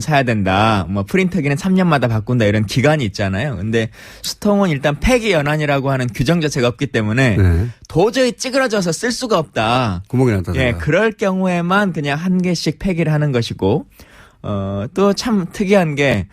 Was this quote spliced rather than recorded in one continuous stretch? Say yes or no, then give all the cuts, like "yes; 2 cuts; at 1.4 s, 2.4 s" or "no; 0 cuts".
yes; 1 cut; at 8.7 s